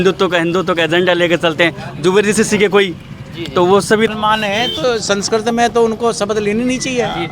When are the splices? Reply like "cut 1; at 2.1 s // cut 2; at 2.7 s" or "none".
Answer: cut 1; at 4.1 s